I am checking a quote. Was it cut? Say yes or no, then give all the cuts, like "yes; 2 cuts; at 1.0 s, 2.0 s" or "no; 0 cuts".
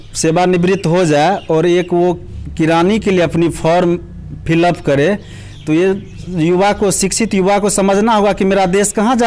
no; 0 cuts